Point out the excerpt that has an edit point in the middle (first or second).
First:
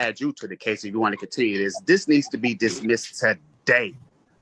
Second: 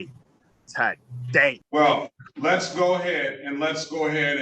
second